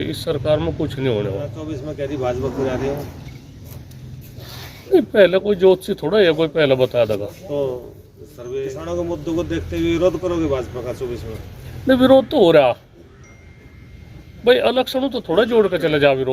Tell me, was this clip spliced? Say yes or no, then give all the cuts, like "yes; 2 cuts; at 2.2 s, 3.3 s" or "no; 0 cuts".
yes; 2 cuts; at 1.7 s, 8.6 s